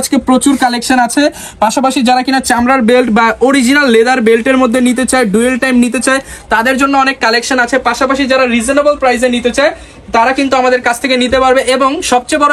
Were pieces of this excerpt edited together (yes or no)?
no